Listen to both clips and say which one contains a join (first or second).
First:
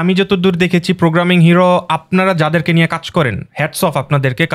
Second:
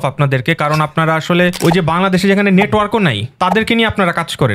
second